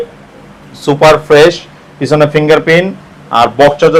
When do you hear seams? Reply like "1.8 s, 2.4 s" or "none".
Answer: none